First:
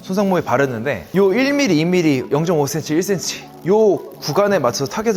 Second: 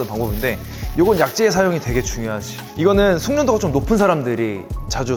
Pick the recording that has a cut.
first; 1 cut; at 1.0 s

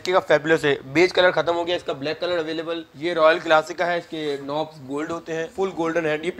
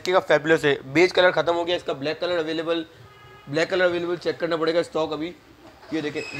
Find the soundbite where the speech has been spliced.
first; 2 cuts; at 2.9 s, 5.5 s

